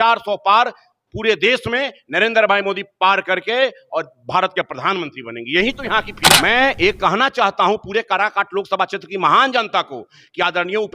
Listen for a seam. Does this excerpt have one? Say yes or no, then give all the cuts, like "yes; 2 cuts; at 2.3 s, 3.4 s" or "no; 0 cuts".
yes; 1 cut; at 6.2 s